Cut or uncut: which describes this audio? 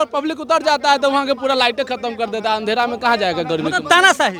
uncut